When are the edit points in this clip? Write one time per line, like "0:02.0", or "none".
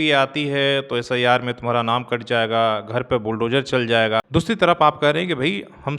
0:04.3

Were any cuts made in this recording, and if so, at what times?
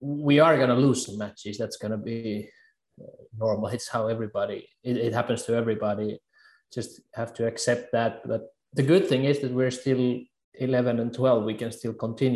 none

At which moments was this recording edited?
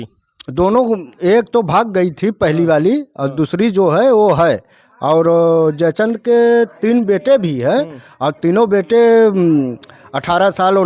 none

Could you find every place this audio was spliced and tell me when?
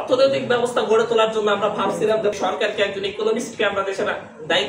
0:02.4

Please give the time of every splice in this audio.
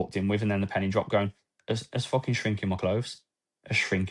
none

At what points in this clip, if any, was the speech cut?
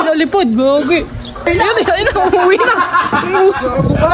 0:01.5

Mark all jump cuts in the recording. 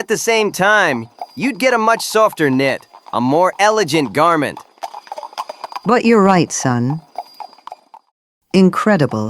none

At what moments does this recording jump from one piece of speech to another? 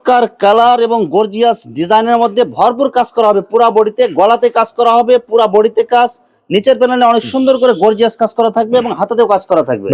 none

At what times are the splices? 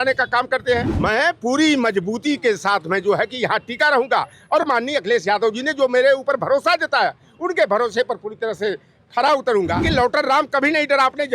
0:00.9
0:09.9

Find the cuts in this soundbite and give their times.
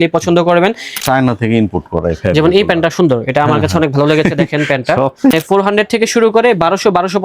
0:01.0
0:05.3

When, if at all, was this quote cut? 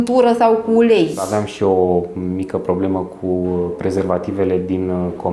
0:01.2

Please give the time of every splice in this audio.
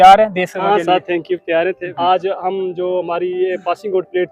0:01.9

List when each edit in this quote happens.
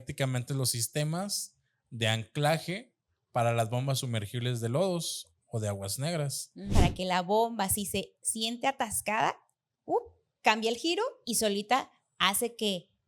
0:06.7
0:11.2

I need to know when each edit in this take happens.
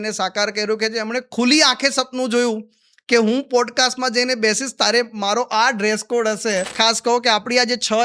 0:06.7

